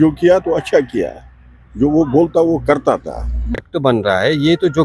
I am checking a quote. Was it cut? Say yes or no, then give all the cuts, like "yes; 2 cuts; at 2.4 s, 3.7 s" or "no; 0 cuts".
yes; 1 cut; at 3.7 s